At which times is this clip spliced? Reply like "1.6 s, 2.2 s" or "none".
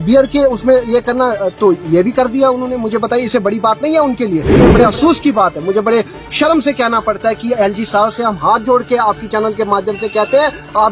4.6 s